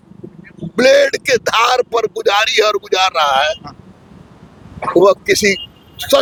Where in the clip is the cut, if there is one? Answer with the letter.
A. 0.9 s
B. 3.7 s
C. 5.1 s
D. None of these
D